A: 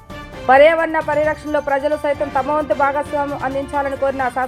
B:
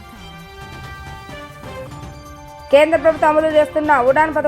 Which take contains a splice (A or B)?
B